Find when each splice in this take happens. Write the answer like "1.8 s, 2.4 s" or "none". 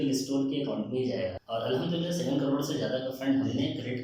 1.4 s